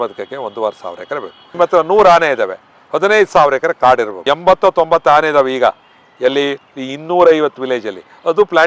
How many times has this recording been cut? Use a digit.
2